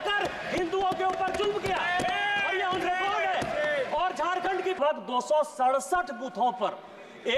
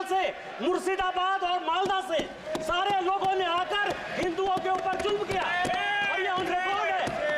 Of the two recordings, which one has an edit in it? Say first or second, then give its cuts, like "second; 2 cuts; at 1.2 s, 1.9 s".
first; 1 cut; at 4.8 s